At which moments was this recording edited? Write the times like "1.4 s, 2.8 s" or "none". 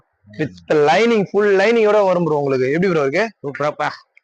none